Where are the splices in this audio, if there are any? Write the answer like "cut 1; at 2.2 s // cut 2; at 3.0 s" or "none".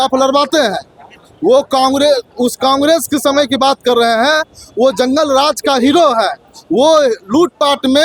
none